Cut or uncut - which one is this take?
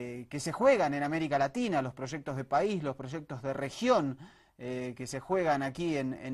cut